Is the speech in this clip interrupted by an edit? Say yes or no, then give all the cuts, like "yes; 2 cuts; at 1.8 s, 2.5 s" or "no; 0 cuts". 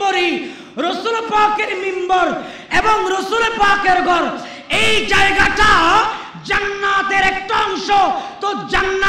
no; 0 cuts